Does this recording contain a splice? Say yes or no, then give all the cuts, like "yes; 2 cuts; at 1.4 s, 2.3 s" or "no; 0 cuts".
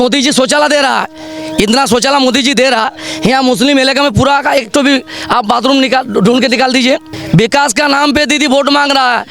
yes; 1 cut; at 7.1 s